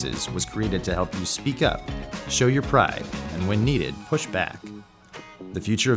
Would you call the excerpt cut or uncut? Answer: cut